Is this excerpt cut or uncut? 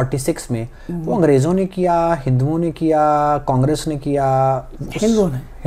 uncut